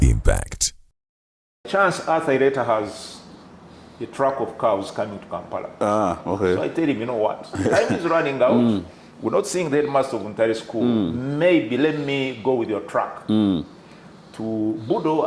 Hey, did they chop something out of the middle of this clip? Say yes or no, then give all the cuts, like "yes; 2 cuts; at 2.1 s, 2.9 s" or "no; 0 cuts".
yes; 1 cut; at 1.7 s